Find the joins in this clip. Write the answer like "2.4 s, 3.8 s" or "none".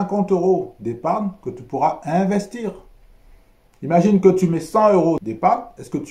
5.2 s

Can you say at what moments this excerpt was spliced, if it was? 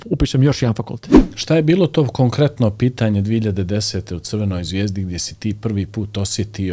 1.3 s

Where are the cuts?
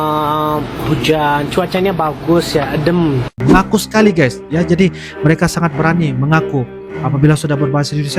3.3 s

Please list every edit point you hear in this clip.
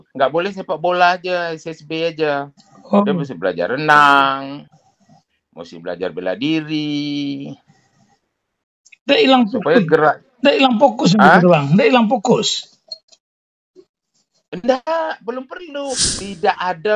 16.0 s

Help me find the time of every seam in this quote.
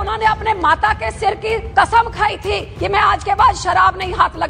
1.7 s, 2.7 s

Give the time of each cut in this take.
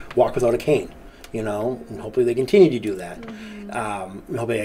none

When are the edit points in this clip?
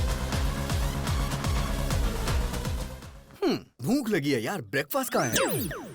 1.7 s

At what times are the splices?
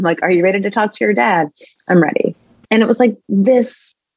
2.5 s

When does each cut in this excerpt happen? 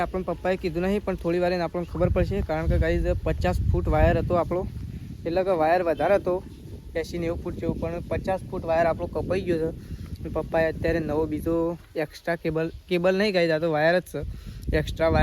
none

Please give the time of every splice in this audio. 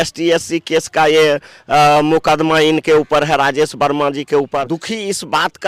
4.7 s

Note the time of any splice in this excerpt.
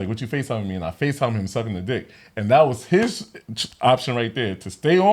none

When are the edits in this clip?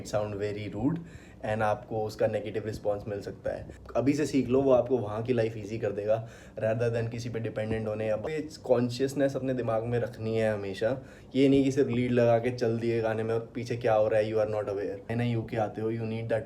3.8 s, 8.3 s, 15.1 s

